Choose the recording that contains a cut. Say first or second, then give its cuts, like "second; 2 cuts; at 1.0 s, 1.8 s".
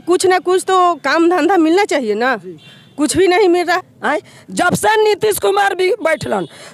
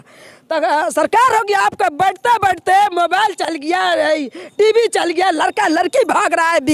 first; 1 cut; at 3.8 s